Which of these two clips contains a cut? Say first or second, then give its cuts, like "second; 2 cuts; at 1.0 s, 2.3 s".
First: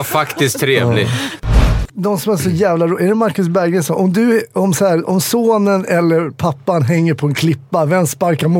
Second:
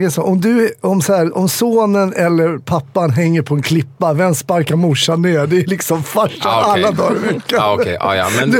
first; 1 cut; at 1.7 s